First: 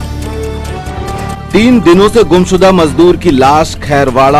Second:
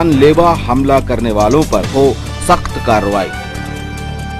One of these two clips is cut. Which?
first; 1 cut; at 0.9 s

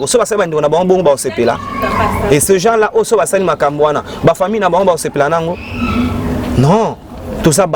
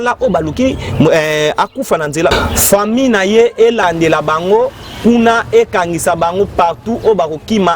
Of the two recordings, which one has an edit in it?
second; 2 cuts; at 2.3 s, 3.8 s

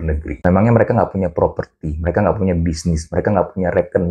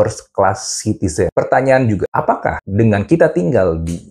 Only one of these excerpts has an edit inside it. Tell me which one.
second; 2 cuts; at 1.3 s, 2.4 s

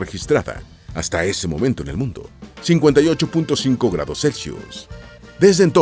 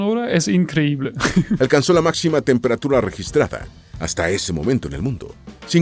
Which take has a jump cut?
second; 1 cut; at 1.6 s

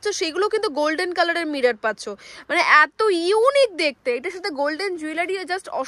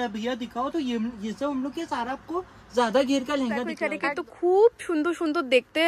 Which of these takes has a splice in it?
second; 1 cut; at 3.8 s

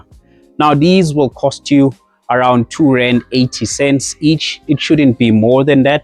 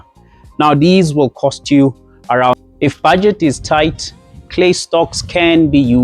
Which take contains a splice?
second; 1 cut; at 2.5 s

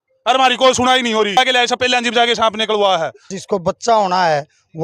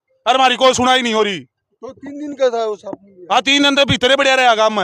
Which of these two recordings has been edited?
first; 2 cuts; at 1.4 s, 3.4 s

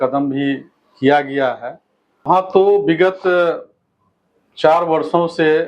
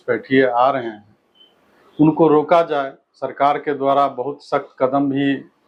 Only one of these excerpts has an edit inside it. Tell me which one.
first; 1 cut; at 2.3 s

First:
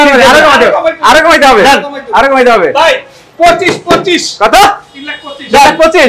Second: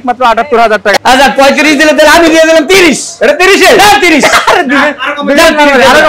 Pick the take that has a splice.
second; 1 cut; at 0.9 s

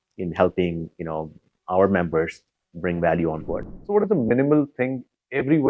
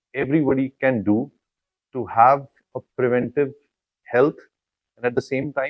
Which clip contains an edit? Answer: first; 1 cut; at 3.5 s

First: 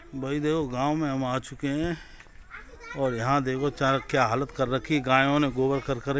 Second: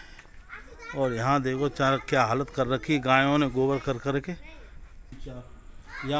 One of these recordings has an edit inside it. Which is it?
second; 1 cut; at 5.1 s

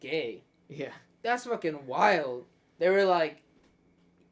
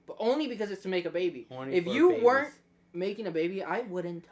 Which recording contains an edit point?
first; 1 cut; at 1.0 s

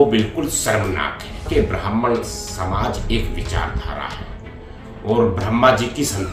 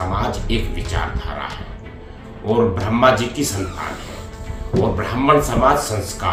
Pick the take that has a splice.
first; 1 cut; at 1.5 s

